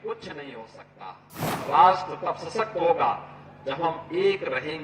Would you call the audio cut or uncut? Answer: cut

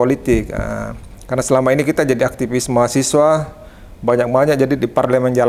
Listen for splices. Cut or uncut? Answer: uncut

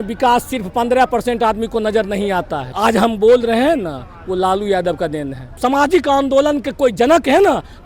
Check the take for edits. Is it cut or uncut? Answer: cut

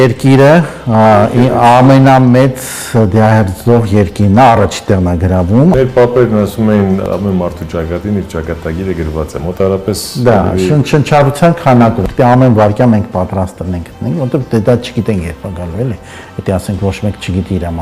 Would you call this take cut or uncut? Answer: cut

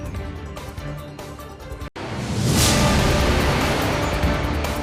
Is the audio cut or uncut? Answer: uncut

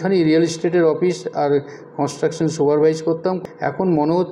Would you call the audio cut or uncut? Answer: cut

